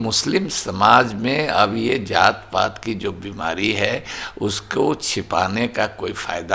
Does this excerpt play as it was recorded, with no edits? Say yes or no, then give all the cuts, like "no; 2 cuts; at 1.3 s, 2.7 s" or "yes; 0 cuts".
yes; 0 cuts